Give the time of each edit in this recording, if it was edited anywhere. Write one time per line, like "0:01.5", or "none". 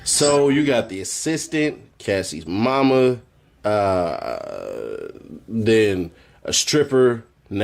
0:01.0
0:05.8